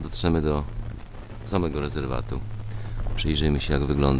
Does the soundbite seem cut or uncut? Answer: uncut